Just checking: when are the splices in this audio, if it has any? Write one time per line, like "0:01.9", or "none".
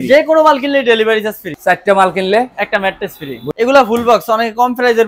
0:01.5
0:03.4